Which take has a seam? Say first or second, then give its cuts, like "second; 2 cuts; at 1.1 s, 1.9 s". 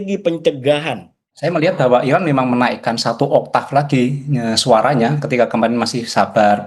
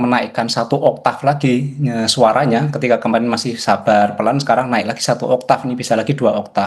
first; 1 cut; at 1.3 s